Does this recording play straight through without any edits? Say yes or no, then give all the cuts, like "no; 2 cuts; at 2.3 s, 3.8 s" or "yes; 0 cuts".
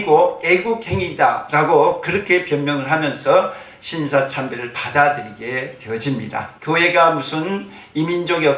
no; 1 cut; at 6.5 s